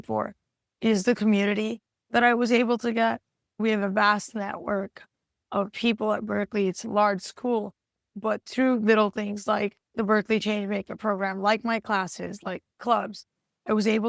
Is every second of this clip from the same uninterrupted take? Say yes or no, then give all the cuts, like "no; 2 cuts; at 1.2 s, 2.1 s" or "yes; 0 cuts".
yes; 0 cuts